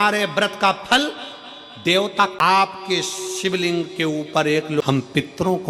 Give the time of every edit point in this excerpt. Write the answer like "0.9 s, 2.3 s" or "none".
2.4 s, 4.8 s